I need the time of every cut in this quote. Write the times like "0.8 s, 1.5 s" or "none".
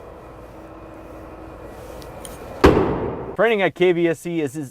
3.2 s